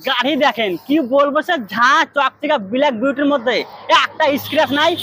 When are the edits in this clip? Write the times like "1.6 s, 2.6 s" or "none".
none

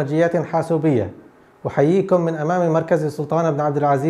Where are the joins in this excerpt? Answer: none

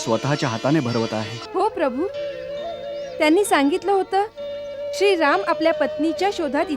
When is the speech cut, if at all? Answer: 1.4 s

